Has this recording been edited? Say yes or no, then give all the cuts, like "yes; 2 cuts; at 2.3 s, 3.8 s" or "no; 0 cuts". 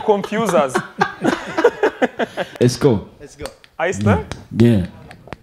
yes; 1 cut; at 2.5 s